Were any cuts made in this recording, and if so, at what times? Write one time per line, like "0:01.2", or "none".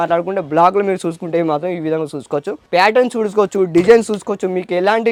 none